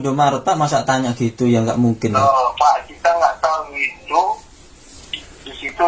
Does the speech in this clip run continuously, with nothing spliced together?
yes; 0 cuts

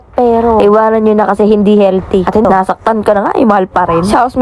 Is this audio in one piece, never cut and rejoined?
no; 1 cut; at 2.4 s

